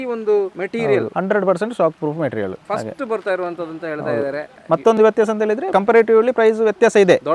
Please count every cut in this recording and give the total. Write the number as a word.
three